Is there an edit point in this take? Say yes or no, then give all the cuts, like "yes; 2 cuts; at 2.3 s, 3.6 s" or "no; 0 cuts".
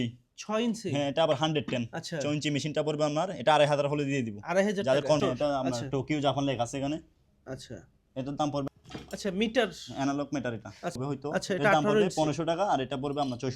yes; 3 cuts; at 5.2 s, 8.7 s, 11.0 s